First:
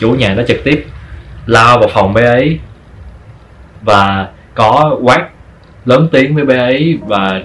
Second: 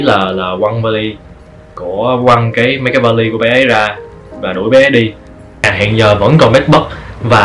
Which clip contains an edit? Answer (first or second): second